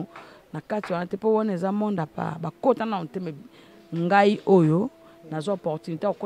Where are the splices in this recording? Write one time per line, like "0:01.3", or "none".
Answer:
none